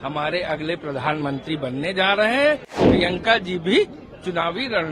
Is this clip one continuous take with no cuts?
no; 1 cut; at 2.7 s

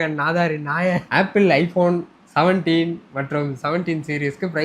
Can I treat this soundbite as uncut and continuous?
no; 1 cut; at 1.0 s

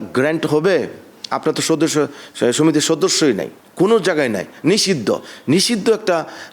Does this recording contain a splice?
no; 0 cuts

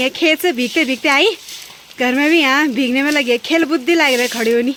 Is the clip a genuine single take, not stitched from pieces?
yes; 0 cuts

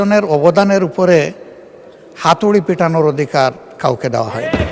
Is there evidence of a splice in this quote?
no; 0 cuts

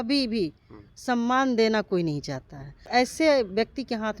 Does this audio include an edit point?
yes; 1 cut; at 2.8 s

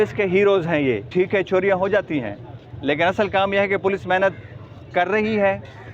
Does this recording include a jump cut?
yes; 1 cut; at 1.0 s

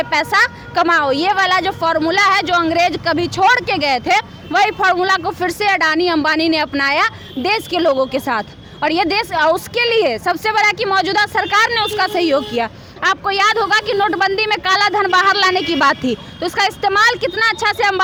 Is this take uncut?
yes; 0 cuts

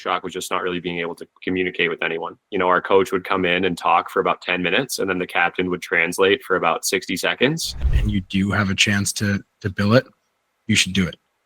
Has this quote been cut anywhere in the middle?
yes; 3 cuts; at 1.2 s, 2.4 s, 7.9 s

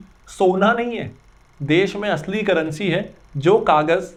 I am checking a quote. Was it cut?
no; 0 cuts

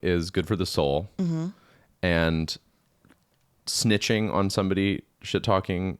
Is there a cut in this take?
no; 0 cuts

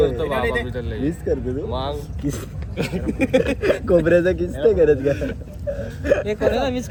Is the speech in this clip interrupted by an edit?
no; 0 cuts

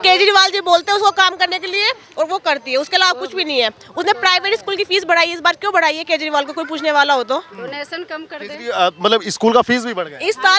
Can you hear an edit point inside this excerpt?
no; 0 cuts

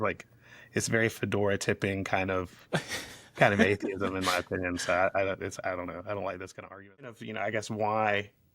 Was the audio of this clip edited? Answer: yes; 1 cut; at 7.1 s

